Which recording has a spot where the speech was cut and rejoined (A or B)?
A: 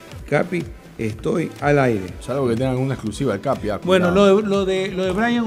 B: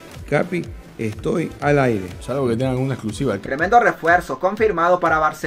B